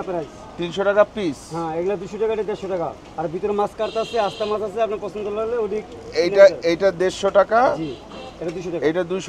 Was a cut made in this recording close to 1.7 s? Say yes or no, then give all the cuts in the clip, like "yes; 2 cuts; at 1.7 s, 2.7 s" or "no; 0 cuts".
no; 0 cuts